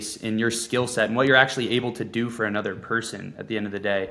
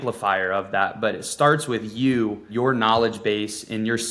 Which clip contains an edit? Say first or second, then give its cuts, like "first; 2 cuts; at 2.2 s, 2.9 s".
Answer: second; 1 cut; at 2.5 s